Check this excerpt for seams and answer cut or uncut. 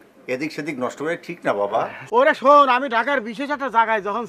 cut